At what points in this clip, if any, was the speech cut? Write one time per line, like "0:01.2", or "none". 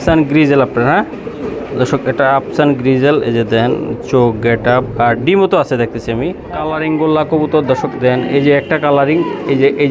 0:06.5